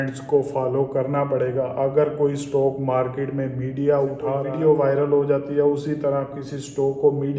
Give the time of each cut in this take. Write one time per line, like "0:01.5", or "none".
0:04.5